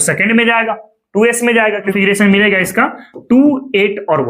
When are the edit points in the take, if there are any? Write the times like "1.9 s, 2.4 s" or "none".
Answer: 1.9 s